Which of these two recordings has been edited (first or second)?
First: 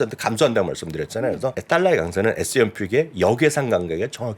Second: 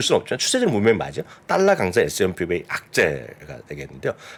first